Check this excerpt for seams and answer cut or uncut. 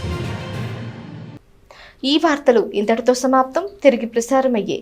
uncut